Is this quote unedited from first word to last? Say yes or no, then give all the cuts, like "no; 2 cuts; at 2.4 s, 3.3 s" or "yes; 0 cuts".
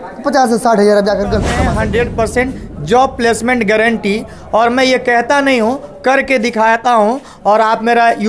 no; 1 cut; at 1.5 s